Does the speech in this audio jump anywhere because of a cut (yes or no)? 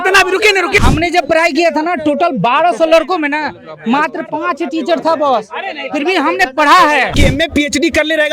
yes